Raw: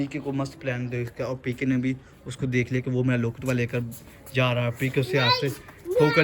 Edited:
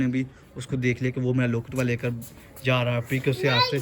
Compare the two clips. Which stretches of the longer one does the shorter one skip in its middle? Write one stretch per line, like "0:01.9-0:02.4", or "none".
none